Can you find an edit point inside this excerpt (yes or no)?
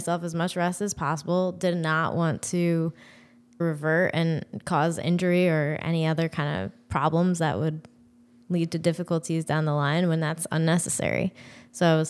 yes